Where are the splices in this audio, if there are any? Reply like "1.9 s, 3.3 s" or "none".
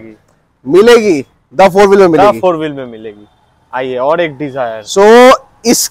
none